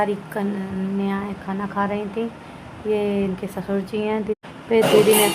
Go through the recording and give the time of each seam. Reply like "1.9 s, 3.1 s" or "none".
4.4 s